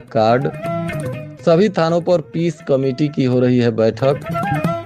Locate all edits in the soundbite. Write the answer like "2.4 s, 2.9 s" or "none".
none